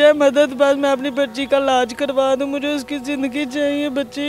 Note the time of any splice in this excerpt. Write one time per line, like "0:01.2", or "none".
none